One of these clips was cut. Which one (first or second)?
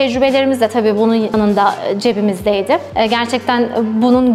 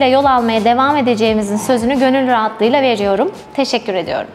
first